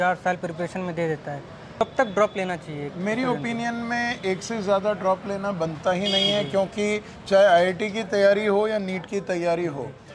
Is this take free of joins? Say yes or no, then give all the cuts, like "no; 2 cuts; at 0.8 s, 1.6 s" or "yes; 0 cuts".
yes; 0 cuts